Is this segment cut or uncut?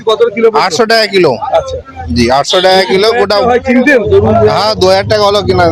uncut